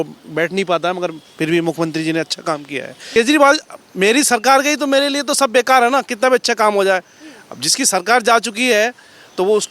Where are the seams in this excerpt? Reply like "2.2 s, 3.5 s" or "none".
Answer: 3.2 s

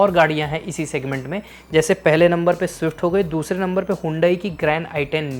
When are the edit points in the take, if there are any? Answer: none

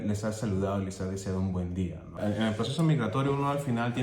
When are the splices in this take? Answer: 2.2 s

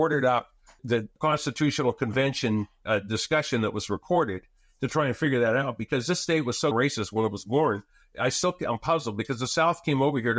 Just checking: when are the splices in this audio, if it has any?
6.7 s

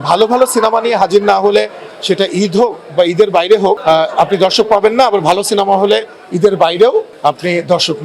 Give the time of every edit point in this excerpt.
3.8 s, 7.1 s

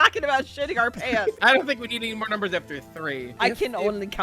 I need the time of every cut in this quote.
1.4 s, 3.3 s

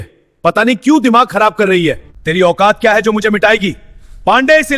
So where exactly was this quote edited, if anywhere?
2.1 s

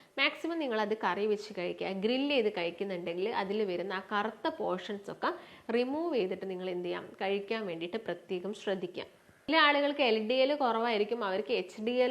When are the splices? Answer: 9.5 s

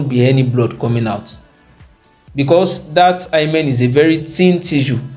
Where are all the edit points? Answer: none

